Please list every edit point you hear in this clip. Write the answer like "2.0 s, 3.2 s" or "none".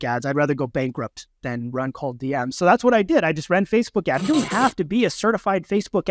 4.2 s